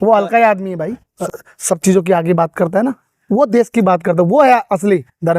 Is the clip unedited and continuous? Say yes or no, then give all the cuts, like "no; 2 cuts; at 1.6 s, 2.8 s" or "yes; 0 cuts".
no; 1 cut; at 1.1 s